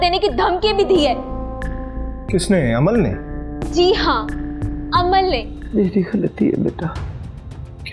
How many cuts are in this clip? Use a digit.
1